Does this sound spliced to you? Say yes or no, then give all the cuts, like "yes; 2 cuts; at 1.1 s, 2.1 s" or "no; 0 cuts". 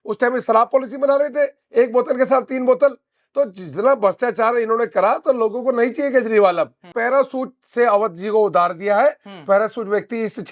yes; 1 cut; at 6.9 s